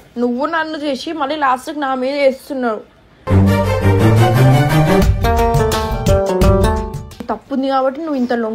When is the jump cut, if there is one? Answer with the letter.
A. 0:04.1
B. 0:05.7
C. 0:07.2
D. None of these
C